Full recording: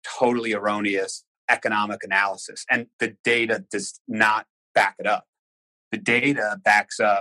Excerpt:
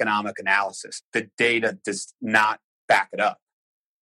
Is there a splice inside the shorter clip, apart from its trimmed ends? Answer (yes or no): yes